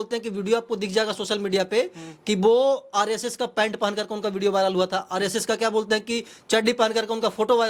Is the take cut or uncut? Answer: uncut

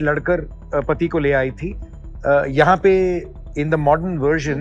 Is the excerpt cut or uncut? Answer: uncut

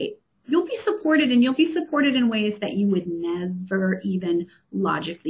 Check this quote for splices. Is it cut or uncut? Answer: uncut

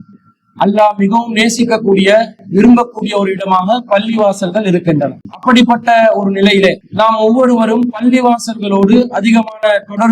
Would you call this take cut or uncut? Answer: cut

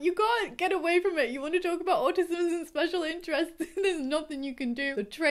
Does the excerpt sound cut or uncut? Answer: uncut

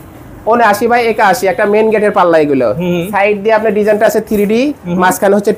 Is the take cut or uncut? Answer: uncut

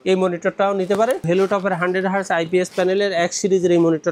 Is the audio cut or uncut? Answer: cut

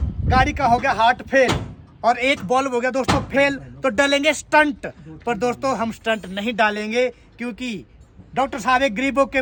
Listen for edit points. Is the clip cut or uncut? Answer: uncut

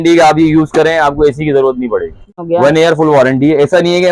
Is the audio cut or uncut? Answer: cut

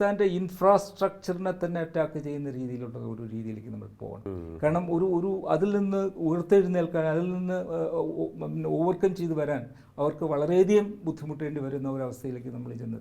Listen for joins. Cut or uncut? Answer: cut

